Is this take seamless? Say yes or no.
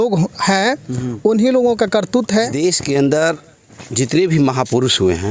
no